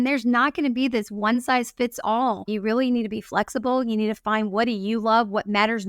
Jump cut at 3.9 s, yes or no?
no